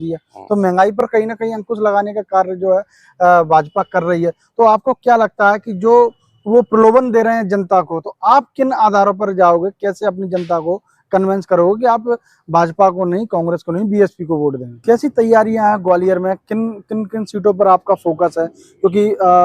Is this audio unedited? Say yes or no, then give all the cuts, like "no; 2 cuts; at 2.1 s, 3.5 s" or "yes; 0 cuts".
no; 1 cut; at 14.7 s